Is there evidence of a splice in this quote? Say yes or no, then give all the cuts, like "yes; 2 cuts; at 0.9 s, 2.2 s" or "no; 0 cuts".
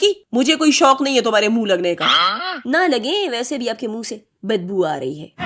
no; 0 cuts